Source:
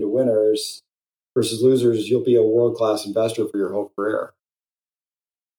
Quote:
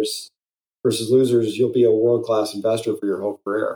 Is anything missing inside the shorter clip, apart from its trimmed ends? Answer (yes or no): no